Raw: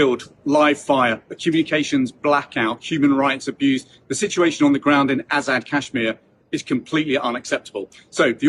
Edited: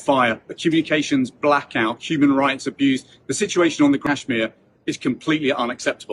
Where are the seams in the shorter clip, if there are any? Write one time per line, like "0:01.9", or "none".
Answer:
0:04.0